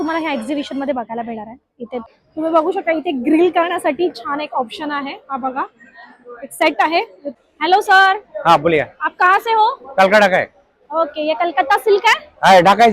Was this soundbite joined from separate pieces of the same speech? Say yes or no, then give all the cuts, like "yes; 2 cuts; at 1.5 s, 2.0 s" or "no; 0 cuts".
yes; 2 cuts; at 2.0 s, 7.2 s